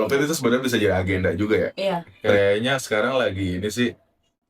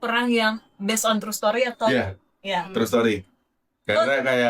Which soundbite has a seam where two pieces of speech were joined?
first; 1 cut; at 2.1 s

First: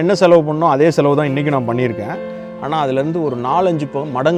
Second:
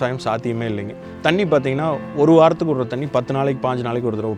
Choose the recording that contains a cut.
second; 1 cut; at 1.0 s

